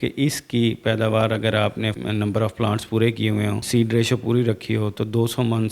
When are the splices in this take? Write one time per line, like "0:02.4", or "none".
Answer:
0:02.0
0:03.6